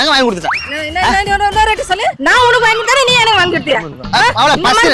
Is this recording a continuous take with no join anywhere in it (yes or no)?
no